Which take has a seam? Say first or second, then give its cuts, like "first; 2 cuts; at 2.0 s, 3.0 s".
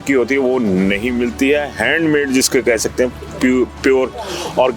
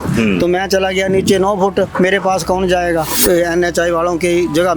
second; 1 cut; at 3.1 s